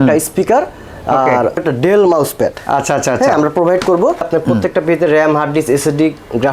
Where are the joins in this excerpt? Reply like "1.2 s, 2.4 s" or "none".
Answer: 1.6 s, 4.3 s